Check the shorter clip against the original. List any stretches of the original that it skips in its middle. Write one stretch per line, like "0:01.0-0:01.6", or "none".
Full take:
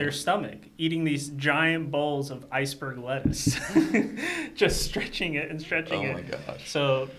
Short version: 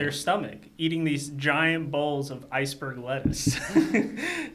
none